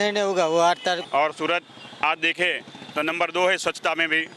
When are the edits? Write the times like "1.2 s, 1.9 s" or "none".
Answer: 1.0 s